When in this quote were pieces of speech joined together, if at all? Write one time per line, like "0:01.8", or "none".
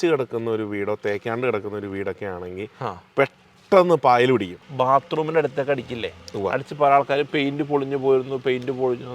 0:04.7